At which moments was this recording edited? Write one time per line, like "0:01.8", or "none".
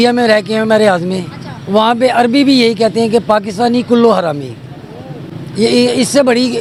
none

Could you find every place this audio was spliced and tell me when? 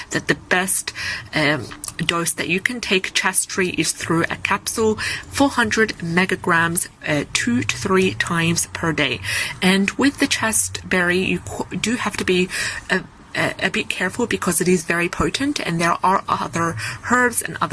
none

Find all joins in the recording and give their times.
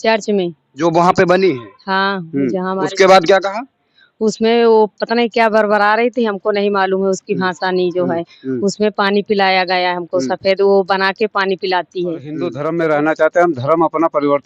0:12.5

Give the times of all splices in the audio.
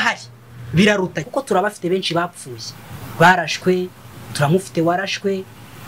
0:01.2

